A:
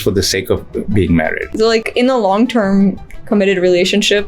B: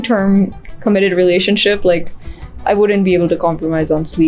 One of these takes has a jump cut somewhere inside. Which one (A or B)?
A